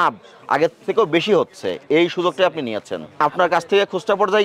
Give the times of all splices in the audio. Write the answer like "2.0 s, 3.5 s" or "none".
3.2 s